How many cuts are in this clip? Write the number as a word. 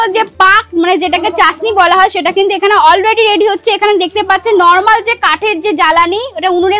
zero